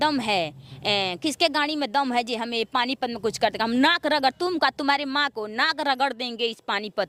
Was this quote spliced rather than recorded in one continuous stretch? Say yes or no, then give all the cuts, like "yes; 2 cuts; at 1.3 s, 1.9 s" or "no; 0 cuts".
no; 0 cuts